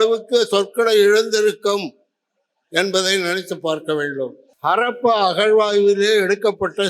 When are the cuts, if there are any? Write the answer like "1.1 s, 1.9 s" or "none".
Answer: 4.5 s